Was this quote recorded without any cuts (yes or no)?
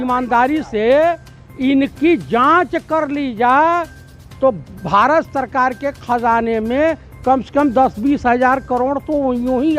yes